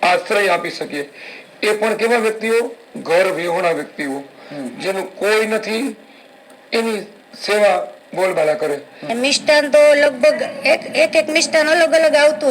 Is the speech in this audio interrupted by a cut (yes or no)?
yes